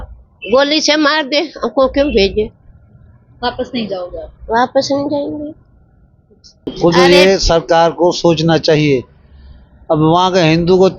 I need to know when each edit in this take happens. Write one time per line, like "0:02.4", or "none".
0:06.7